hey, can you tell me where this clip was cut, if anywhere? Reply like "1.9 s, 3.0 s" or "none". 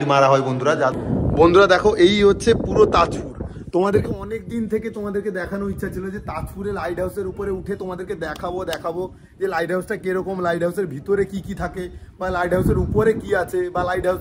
0.9 s